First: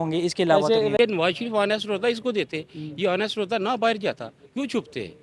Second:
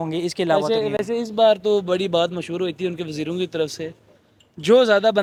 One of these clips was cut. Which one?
first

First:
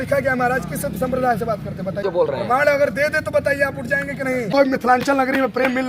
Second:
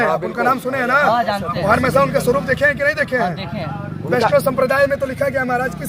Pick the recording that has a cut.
first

